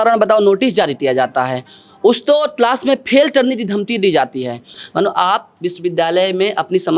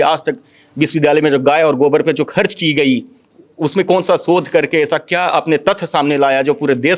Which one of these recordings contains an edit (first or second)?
first